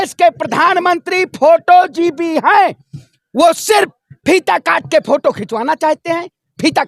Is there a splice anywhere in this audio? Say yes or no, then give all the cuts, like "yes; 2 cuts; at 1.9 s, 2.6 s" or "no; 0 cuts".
no; 0 cuts